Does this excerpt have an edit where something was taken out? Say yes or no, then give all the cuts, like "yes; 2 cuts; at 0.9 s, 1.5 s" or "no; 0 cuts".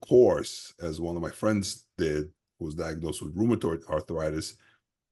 no; 0 cuts